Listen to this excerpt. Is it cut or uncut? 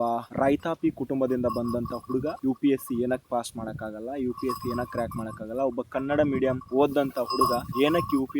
uncut